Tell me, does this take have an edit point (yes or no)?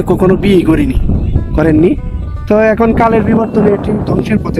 no